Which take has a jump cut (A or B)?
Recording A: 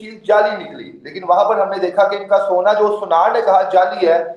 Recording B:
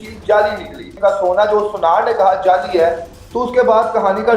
B